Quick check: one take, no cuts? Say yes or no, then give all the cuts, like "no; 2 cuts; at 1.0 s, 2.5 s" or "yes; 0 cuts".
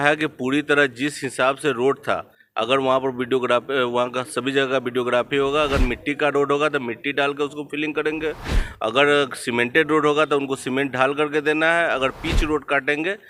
yes; 0 cuts